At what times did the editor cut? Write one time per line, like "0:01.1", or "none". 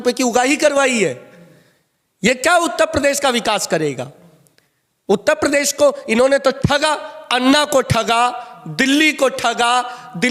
none